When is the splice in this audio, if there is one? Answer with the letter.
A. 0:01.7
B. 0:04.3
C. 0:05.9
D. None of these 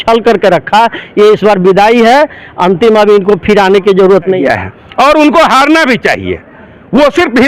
B